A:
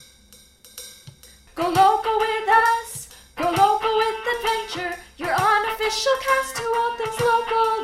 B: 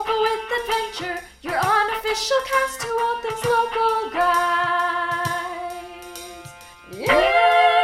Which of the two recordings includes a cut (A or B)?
A